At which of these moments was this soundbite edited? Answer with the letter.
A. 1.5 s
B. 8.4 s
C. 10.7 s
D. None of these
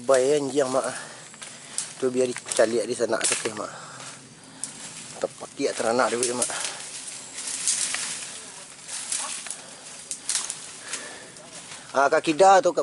D